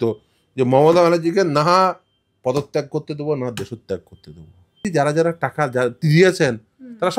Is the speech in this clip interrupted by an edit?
yes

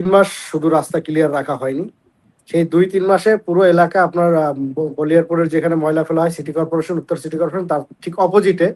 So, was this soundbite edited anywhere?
no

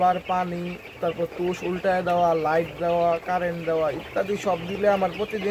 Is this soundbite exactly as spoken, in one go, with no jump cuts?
yes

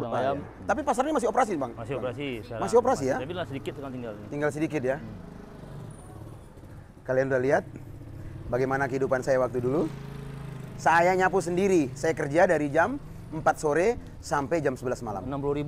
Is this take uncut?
yes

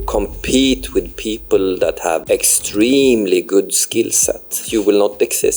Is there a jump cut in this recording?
yes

